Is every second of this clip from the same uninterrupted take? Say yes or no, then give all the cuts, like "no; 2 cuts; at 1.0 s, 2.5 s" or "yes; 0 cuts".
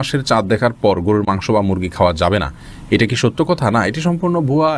yes; 0 cuts